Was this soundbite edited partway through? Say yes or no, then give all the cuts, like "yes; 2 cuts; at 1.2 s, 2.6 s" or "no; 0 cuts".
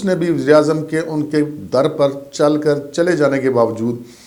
no; 0 cuts